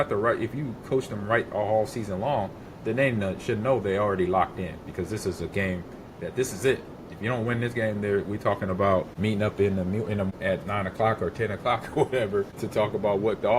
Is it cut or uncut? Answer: cut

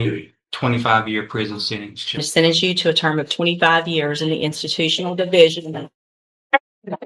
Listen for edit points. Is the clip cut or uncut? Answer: cut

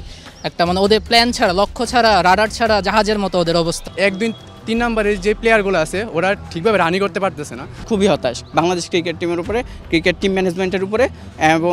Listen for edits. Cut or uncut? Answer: cut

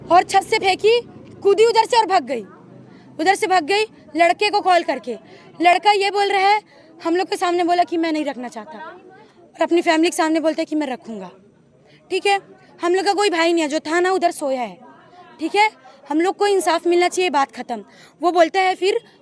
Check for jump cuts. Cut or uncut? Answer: uncut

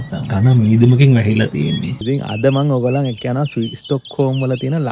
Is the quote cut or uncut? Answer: cut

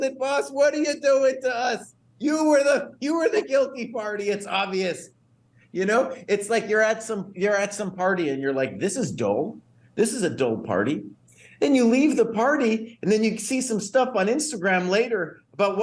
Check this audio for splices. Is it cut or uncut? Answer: uncut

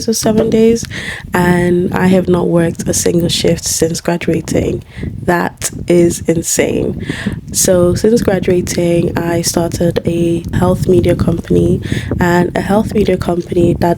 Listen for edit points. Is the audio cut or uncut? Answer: cut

